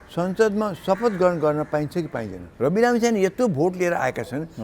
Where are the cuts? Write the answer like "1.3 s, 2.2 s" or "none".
2.4 s